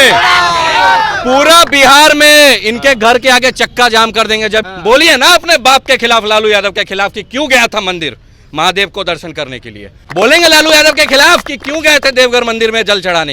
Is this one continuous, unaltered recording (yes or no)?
no